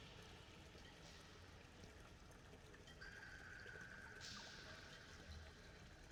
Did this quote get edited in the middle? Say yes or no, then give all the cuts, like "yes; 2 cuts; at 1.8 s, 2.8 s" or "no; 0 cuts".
no; 0 cuts